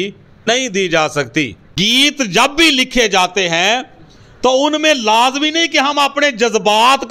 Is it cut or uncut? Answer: cut